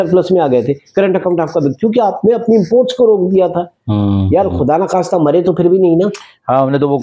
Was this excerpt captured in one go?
yes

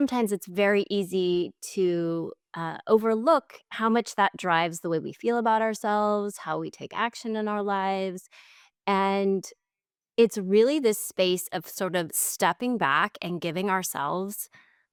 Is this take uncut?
yes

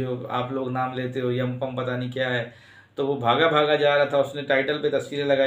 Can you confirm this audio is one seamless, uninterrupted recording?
yes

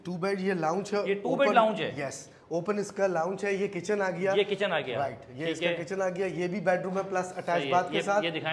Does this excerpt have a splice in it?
no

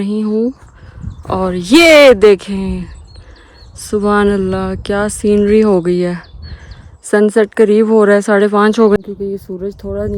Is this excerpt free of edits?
no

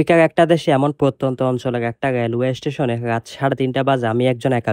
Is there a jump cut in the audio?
no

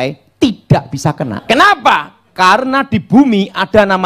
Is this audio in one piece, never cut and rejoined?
no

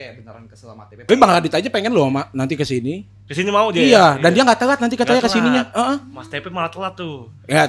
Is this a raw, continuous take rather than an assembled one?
no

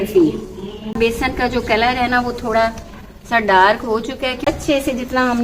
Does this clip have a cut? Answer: yes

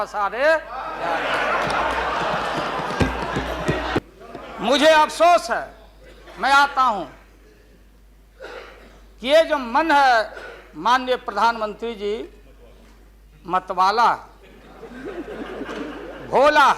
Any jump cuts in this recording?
yes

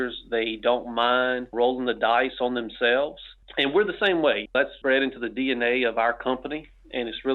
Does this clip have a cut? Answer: no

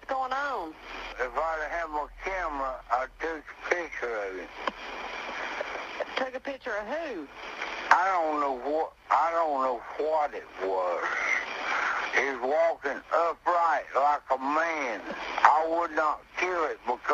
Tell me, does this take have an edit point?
no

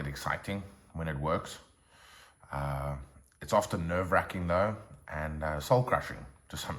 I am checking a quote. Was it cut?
no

